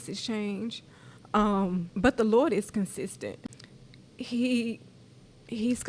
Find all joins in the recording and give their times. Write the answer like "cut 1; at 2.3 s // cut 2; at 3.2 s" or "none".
cut 1; at 1.9 s // cut 2; at 3.4 s